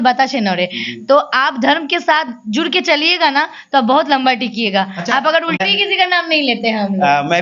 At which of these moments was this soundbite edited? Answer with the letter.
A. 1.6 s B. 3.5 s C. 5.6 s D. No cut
C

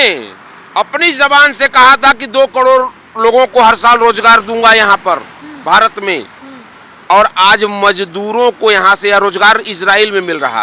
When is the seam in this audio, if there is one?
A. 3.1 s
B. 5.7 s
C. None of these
C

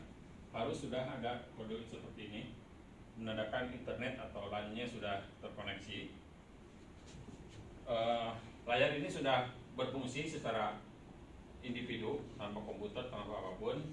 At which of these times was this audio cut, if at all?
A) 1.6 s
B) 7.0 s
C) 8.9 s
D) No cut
B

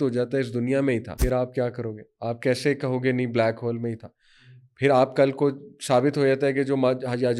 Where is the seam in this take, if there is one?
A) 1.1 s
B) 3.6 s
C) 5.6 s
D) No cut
A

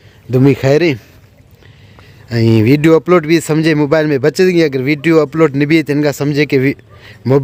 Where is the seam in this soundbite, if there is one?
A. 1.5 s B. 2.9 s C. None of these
C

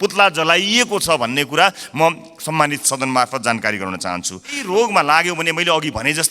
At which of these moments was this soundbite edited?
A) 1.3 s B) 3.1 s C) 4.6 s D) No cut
C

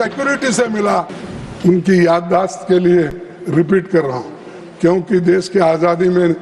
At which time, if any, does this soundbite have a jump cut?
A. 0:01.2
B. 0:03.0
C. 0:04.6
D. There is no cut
A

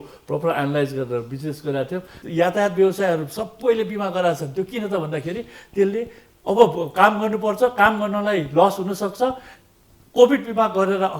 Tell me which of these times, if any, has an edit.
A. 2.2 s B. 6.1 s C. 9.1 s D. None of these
A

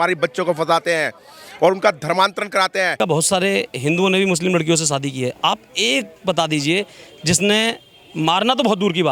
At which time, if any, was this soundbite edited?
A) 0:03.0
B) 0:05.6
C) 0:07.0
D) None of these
A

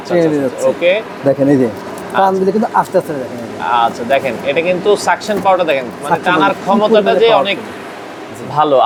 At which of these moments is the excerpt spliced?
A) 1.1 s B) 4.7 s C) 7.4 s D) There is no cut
D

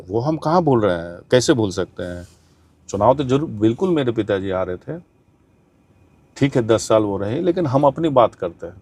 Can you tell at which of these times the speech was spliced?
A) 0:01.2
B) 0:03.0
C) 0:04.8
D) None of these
D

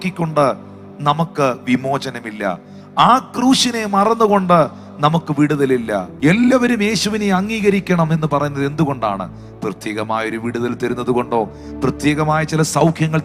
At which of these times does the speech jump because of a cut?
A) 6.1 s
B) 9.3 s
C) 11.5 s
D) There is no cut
A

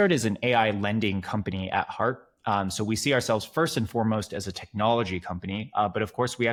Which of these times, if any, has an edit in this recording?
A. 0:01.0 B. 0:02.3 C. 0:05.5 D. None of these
D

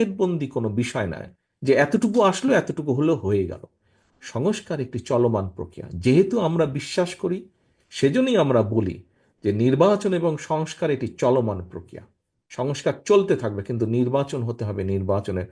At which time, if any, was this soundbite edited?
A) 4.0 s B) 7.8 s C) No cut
C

